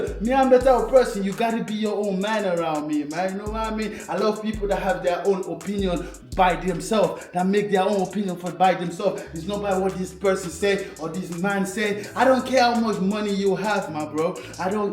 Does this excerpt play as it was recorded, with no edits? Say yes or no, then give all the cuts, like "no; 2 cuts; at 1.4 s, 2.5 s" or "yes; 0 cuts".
yes; 0 cuts